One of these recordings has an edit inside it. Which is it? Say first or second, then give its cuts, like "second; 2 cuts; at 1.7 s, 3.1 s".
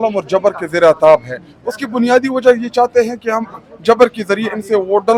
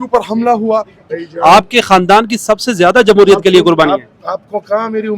second; 1 cut; at 1.1 s